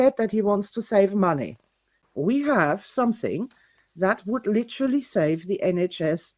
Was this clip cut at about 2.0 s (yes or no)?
yes